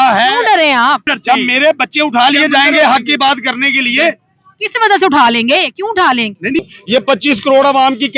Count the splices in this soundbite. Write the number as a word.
two